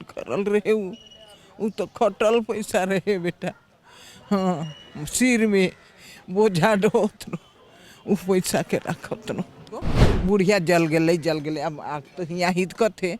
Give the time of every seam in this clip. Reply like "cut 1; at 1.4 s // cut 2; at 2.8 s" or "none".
cut 1; at 10.0 s